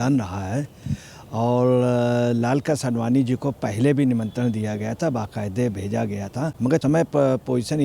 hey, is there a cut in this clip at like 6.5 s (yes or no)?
yes